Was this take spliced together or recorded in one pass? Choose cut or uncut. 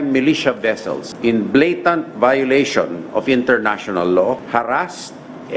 cut